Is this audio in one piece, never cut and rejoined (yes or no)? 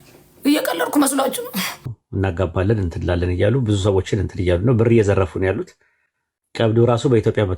no